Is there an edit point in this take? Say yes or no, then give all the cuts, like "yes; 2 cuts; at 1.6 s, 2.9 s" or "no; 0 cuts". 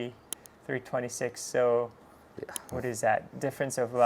no; 0 cuts